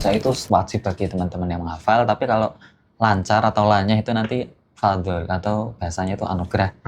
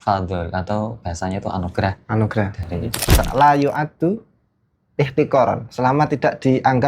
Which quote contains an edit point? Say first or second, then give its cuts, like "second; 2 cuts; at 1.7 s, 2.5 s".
second; 1 cut; at 3.1 s